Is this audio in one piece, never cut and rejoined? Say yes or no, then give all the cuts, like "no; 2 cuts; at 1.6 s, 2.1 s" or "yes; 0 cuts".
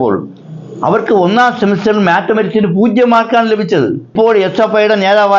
no; 1 cut; at 4.1 s